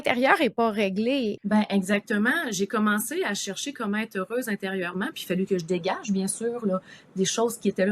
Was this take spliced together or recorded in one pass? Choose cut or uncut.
cut